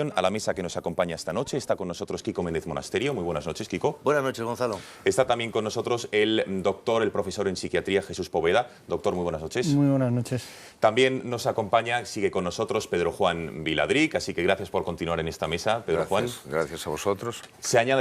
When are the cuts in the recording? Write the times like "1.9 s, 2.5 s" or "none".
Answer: 16.7 s